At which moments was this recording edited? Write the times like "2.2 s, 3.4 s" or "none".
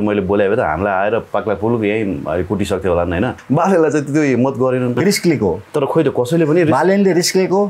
3.4 s, 5.0 s

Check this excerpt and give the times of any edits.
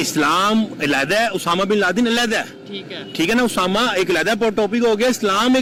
none

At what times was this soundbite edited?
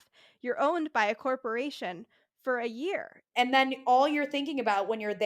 3.2 s

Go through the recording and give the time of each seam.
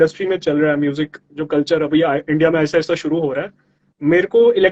none

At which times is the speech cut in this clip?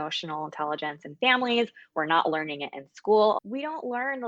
3.4 s

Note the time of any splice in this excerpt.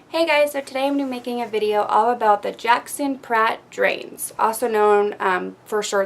5.1 s

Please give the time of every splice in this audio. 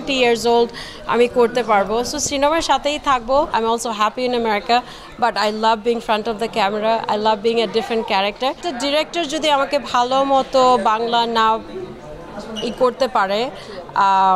3.5 s, 8.6 s

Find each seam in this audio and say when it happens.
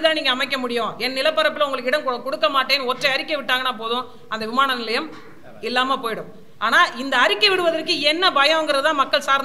none

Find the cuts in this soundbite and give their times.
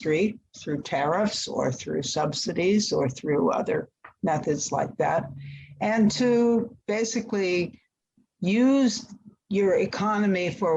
none

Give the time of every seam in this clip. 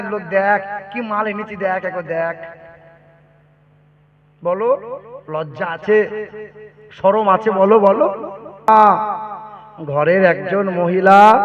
8.7 s

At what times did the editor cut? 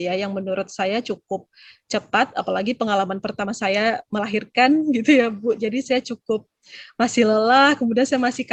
none

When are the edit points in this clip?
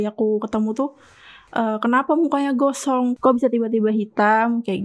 3.2 s

